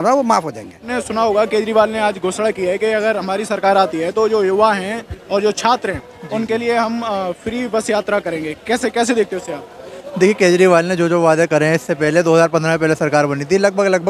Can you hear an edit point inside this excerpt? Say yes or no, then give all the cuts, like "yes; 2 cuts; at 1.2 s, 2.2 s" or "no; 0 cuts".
yes; 1 cut; at 0.9 s